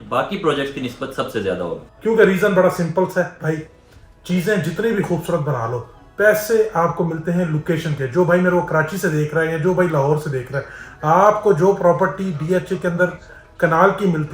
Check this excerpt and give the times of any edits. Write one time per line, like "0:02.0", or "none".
0:01.9